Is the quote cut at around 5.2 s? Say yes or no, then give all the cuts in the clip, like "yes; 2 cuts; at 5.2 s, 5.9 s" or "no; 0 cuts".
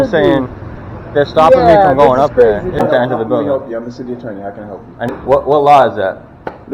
yes; 2 cuts; at 2.8 s, 5.2 s